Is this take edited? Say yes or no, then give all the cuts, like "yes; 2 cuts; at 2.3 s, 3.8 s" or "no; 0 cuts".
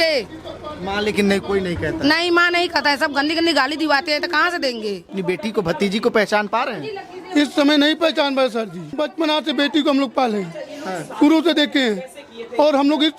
yes; 2 cuts; at 5.2 s, 8.9 s